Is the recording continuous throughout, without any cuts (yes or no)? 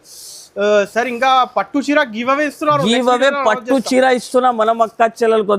yes